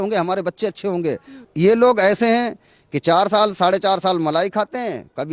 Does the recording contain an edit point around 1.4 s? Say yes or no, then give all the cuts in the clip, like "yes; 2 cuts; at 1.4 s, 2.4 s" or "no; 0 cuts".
yes; 1 cut; at 1.4 s